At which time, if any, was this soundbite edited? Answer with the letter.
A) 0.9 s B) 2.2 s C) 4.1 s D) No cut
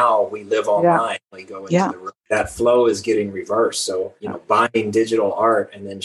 B